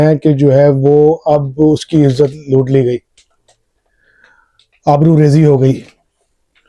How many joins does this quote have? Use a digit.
0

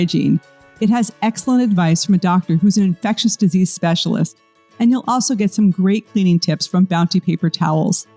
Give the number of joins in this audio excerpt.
0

